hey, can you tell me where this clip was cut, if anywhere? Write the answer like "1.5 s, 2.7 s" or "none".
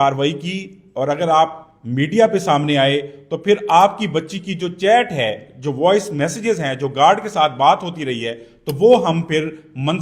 none